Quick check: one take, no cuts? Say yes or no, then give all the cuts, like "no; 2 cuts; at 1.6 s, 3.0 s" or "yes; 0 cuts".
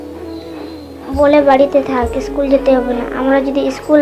yes; 0 cuts